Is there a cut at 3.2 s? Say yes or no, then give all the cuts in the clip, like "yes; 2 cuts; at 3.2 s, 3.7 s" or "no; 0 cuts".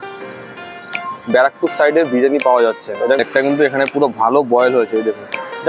yes; 1 cut; at 3.2 s